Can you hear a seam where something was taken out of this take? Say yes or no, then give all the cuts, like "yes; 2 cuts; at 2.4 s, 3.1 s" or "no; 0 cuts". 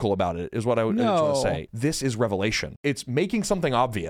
yes; 2 cuts; at 1.6 s, 2.8 s